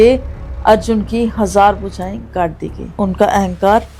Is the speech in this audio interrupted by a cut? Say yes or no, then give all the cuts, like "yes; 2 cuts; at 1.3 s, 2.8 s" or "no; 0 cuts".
yes; 1 cut; at 2.8 s